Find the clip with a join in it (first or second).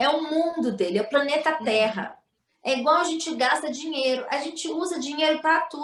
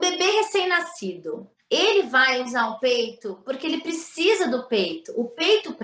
second